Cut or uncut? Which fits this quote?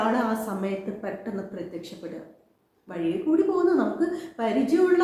uncut